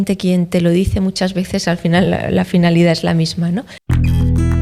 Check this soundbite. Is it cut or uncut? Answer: uncut